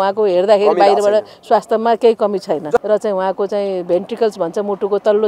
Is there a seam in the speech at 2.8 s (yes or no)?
yes